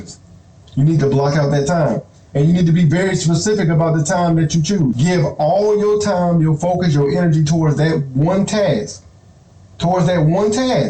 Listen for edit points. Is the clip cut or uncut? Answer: cut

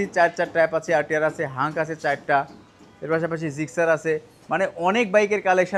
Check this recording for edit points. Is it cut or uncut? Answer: uncut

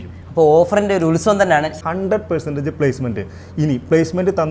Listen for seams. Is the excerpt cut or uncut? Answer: cut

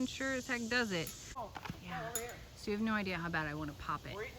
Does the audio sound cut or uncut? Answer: cut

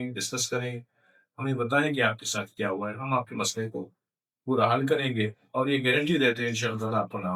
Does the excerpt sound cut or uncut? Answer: uncut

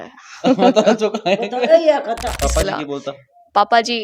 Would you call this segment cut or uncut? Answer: cut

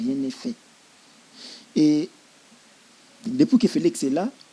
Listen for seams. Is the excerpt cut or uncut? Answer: uncut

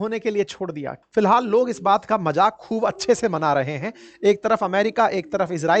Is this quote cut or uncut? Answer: cut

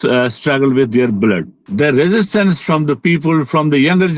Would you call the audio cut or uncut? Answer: cut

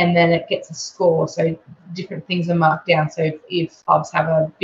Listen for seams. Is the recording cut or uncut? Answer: uncut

